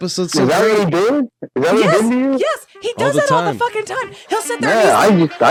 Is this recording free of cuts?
yes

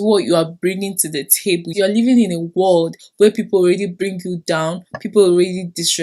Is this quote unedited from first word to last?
no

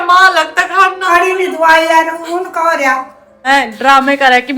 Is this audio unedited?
no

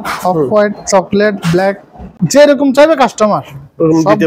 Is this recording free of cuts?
yes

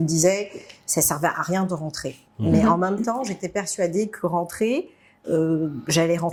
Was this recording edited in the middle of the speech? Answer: no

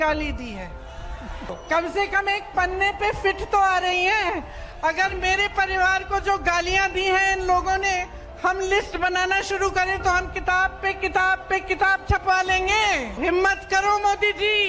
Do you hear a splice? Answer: yes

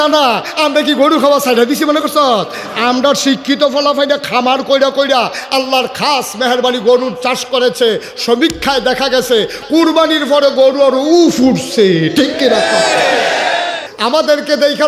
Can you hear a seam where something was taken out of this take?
yes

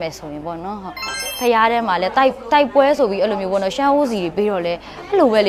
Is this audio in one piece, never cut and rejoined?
no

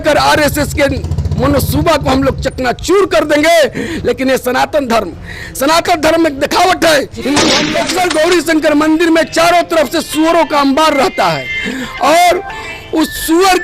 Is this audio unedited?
no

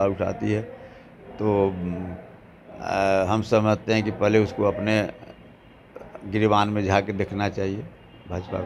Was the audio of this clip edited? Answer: no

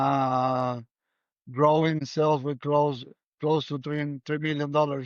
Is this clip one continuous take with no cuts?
no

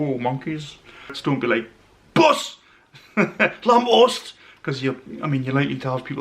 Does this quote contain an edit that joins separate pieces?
yes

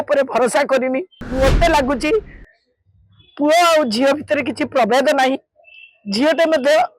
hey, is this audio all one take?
no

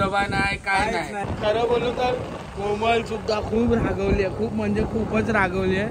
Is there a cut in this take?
yes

